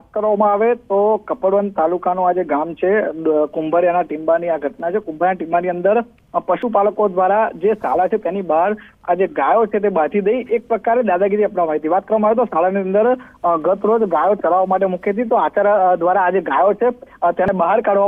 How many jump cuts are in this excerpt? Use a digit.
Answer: 1